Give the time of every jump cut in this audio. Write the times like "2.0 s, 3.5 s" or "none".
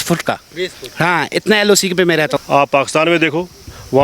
2.4 s